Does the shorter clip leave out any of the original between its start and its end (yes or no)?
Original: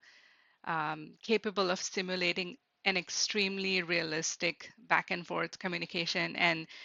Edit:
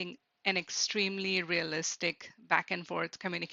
no